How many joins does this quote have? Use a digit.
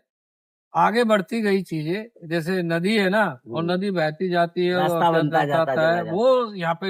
0